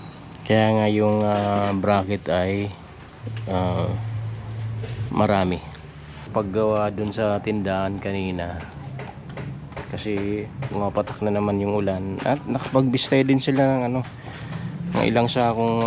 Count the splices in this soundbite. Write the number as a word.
one